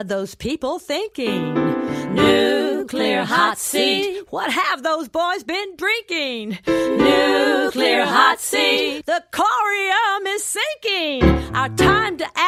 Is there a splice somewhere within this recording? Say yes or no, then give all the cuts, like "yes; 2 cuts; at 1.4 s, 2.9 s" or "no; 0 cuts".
no; 0 cuts